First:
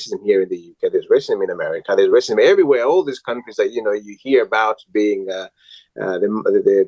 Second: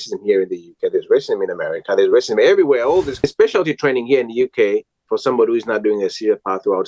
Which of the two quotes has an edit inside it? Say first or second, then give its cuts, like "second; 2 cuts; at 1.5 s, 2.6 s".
second; 1 cut; at 3.2 s